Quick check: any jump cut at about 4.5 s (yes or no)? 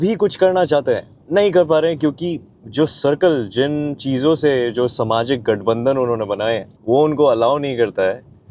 no